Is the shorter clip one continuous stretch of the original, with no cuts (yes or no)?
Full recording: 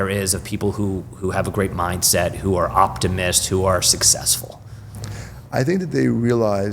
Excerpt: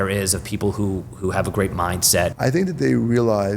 no